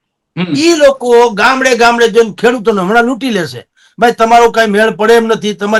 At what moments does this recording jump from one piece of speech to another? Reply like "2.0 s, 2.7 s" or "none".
none

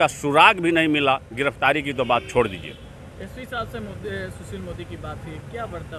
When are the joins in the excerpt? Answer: none

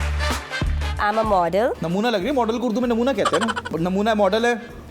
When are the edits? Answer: 1.0 s, 1.8 s, 3.8 s

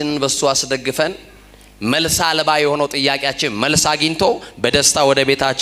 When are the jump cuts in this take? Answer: none

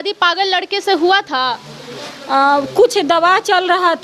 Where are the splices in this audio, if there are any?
none

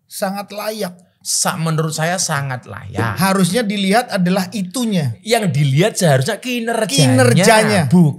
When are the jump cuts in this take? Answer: none

